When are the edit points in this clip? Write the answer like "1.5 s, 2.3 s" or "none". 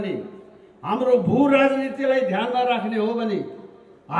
none

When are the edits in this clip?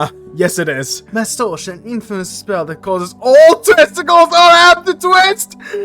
1.0 s

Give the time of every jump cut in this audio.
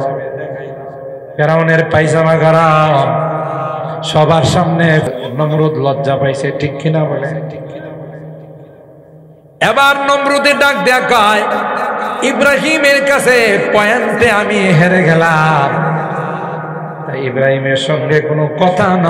5.1 s

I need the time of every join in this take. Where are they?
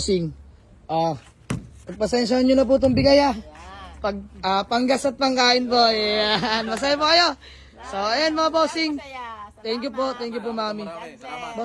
none

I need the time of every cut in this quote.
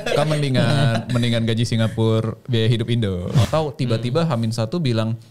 3.4 s

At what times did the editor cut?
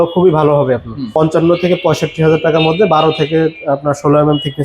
1.0 s

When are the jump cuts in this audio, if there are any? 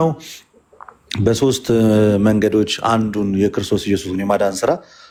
none

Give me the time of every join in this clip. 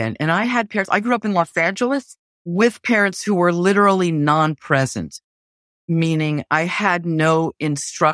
2.4 s

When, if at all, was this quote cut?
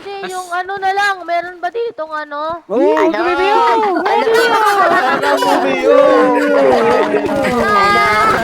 2.7 s

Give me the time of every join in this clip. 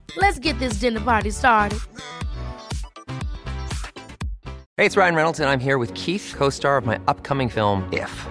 4.6 s

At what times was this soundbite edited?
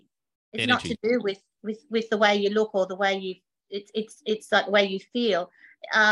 none

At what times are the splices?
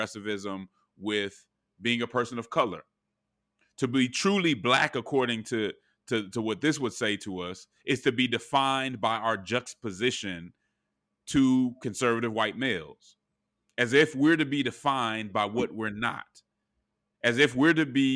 none

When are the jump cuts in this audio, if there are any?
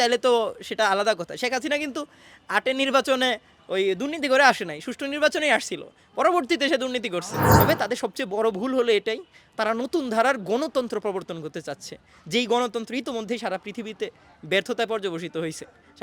7.4 s

